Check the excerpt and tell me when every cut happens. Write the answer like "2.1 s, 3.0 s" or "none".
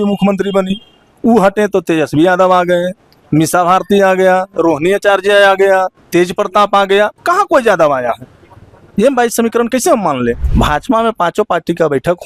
10.4 s